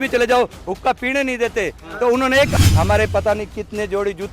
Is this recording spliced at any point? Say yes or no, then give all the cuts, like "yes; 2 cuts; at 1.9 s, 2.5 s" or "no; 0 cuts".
yes; 1 cut; at 2.5 s